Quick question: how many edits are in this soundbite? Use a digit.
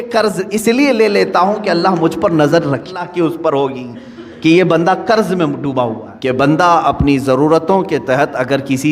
2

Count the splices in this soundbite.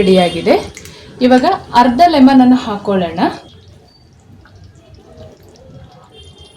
1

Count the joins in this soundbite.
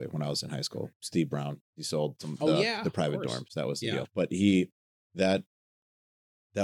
1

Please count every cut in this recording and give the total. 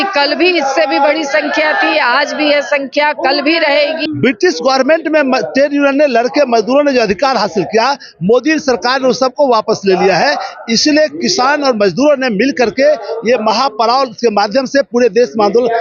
1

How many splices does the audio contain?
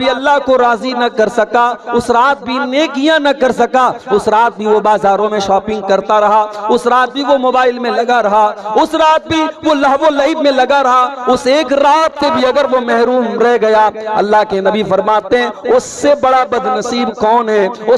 0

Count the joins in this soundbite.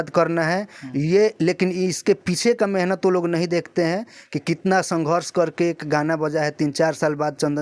0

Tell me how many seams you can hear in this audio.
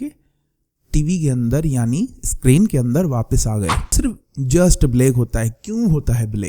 1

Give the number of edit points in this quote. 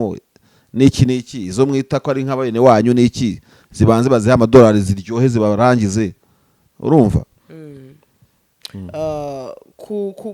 1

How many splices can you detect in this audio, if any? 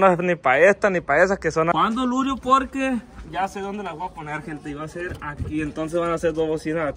1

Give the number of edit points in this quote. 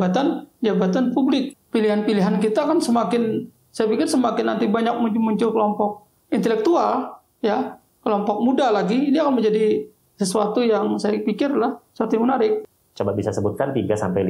2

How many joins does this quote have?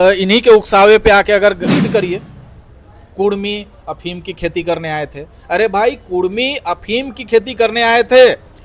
1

